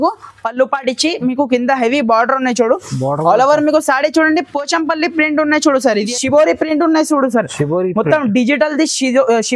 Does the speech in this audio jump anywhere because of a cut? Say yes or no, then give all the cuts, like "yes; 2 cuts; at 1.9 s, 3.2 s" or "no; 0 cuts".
yes; 1 cut; at 6.1 s